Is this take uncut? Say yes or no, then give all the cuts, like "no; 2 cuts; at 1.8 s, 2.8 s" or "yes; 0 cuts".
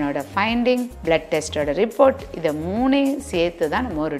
yes; 0 cuts